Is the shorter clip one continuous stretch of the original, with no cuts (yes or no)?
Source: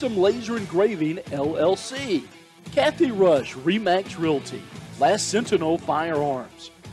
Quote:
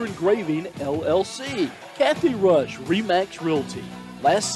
no